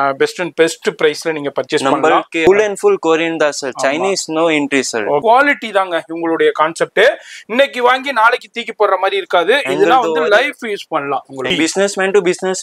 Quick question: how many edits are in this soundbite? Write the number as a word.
three